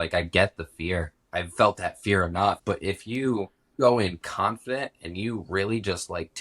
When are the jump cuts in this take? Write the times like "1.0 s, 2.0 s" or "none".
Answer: 1.2 s, 2.6 s, 3.7 s